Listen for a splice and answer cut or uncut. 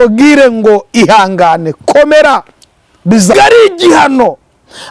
cut